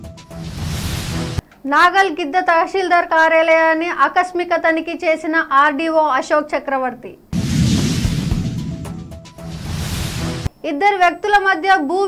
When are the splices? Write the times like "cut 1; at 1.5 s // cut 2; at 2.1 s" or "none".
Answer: cut 1; at 1.3 s